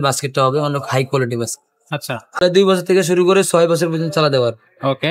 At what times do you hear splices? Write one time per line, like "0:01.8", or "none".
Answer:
0:02.4